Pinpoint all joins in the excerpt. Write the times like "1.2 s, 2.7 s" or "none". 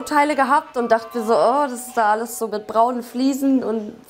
none